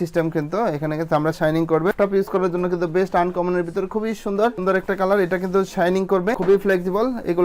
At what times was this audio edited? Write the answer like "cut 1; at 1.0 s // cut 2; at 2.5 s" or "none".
cut 1; at 1.9 s // cut 2; at 4.6 s // cut 3; at 6.4 s